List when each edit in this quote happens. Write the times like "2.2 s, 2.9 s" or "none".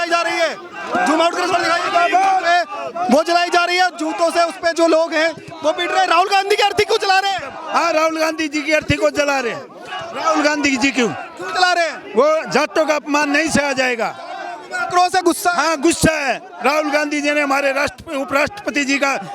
none